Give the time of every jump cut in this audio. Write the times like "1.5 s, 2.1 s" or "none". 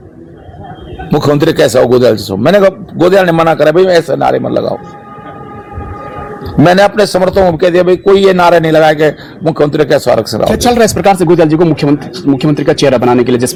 none